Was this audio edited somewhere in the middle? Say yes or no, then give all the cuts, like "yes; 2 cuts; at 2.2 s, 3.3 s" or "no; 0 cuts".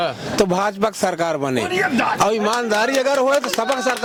no; 0 cuts